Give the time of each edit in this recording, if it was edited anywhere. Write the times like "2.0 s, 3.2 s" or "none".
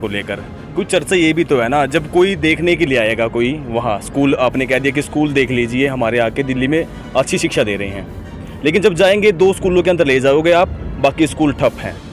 none